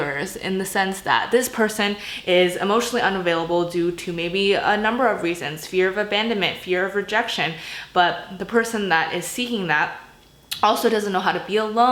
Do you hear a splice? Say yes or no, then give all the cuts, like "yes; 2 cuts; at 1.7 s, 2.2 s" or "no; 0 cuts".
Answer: no; 0 cuts